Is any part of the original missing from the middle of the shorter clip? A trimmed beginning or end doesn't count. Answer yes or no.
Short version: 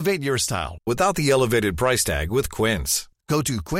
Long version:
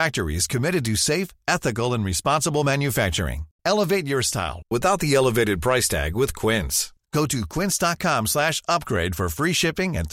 no